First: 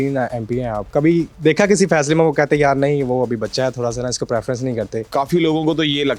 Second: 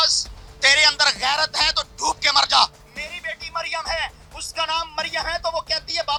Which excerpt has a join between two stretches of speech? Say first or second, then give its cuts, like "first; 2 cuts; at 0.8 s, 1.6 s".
first; 2 cuts; at 0.9 s, 5.1 s